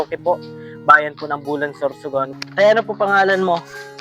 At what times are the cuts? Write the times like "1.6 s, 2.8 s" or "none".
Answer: 2.3 s